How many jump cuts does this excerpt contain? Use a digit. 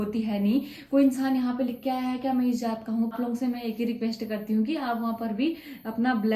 1